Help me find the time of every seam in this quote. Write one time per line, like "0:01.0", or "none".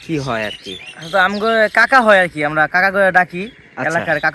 none